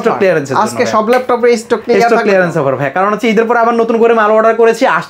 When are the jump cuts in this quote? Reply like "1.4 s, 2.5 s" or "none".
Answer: none